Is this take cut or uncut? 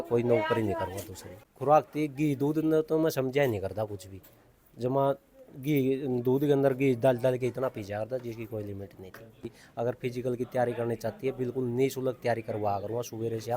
cut